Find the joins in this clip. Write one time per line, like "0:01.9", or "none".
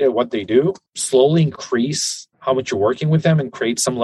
0:00.9